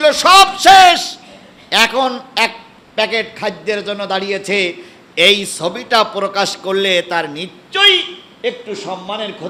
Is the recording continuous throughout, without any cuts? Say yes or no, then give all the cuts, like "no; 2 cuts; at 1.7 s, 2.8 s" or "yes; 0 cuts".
yes; 0 cuts